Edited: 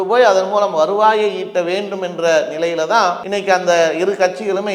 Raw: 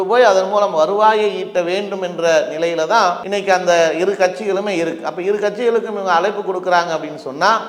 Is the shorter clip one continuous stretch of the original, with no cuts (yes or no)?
yes